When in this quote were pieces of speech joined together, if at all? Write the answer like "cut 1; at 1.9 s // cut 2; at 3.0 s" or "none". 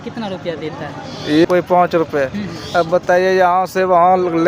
cut 1; at 1.5 s